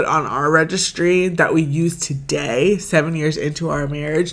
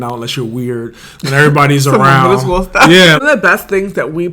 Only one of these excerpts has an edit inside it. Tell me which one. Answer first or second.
second